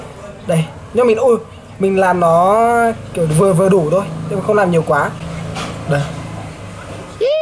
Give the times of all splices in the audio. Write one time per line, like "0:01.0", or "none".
0:05.2